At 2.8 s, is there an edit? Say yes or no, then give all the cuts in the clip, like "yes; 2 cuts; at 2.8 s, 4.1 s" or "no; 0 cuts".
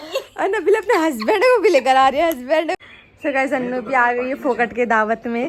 yes; 1 cut; at 2.8 s